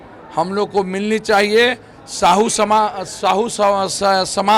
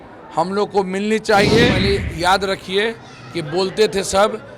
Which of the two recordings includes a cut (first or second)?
second